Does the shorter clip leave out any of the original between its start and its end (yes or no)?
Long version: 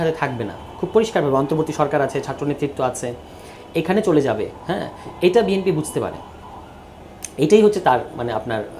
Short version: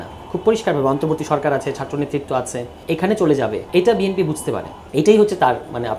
yes